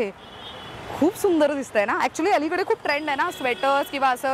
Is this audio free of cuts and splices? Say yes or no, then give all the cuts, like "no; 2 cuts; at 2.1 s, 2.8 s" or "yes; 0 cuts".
yes; 0 cuts